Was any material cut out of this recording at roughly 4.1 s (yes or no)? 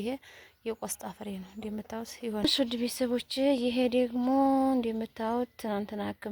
no